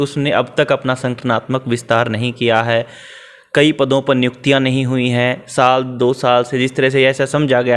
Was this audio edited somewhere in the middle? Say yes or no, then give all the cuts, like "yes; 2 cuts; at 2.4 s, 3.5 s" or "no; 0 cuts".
no; 0 cuts